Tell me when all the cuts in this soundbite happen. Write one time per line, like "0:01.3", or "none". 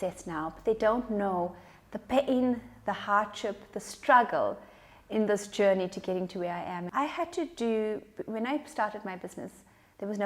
0:06.8